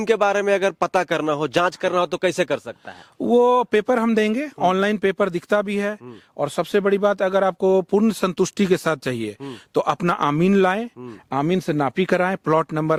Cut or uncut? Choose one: uncut